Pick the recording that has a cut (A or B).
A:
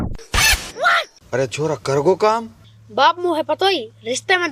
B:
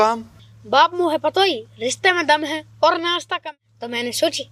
B